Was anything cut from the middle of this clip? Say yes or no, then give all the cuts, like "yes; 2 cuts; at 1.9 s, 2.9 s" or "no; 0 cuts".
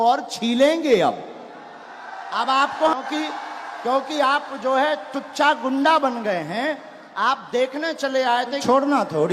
yes; 2 cuts; at 3.0 s, 8.6 s